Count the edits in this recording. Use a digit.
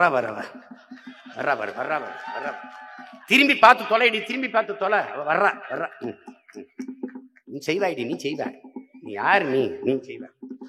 0